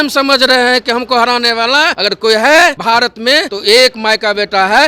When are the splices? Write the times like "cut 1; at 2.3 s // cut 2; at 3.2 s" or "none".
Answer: cut 1; at 2.0 s // cut 2; at 3.2 s